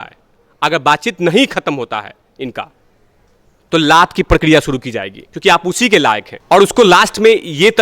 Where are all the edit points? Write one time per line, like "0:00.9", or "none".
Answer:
0:06.3

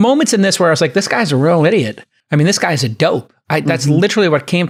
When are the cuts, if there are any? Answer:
none

